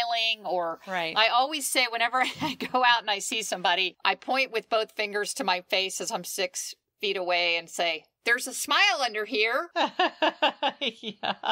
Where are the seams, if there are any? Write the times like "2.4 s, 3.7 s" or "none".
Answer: 3.9 s